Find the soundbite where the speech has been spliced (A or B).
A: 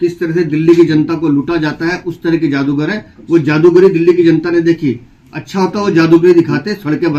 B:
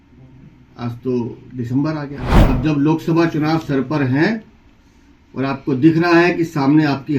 B